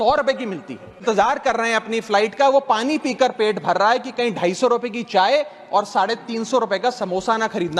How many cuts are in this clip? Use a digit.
1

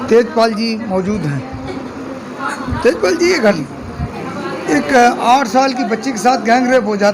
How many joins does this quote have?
1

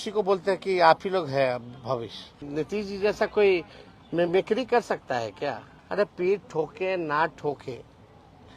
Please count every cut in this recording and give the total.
2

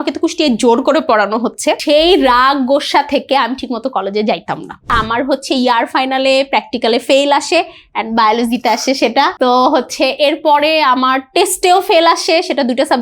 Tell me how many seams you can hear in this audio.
3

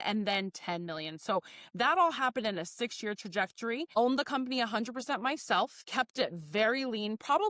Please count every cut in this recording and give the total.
2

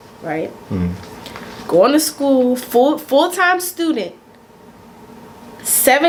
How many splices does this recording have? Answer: 0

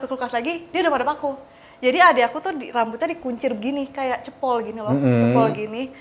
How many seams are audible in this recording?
0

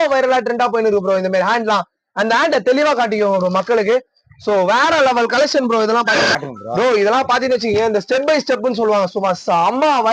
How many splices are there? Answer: 1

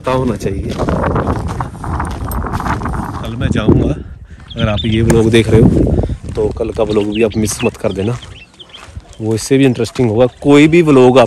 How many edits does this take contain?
1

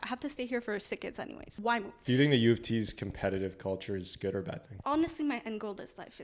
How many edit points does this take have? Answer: 2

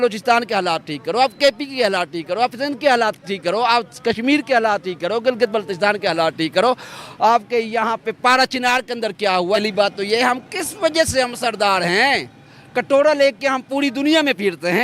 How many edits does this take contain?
1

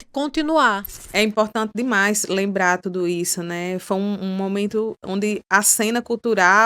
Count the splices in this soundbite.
1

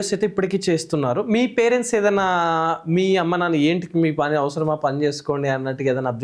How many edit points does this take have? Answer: 0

